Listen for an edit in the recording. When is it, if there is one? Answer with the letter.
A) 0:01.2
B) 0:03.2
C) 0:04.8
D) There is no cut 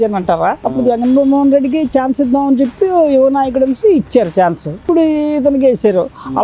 C